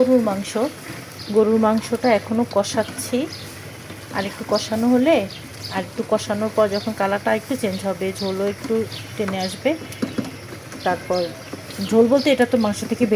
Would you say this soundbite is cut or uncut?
uncut